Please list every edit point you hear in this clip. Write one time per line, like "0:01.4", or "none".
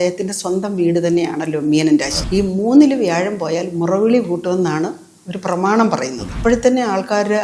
0:02.2
0:06.3